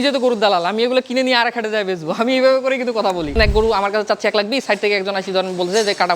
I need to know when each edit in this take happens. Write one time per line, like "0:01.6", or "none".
0:03.3